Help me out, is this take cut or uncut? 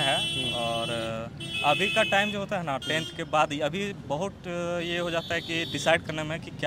uncut